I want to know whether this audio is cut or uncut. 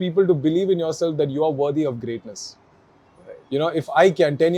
uncut